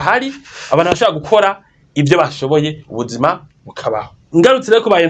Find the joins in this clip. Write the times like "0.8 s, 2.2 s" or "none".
4.2 s